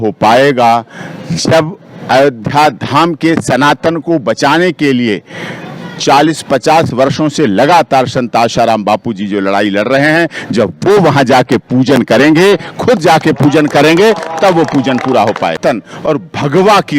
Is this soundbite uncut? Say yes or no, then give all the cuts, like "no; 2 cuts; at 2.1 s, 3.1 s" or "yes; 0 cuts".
no; 1 cut; at 15.6 s